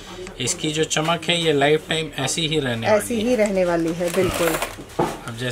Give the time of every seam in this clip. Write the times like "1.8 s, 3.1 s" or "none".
none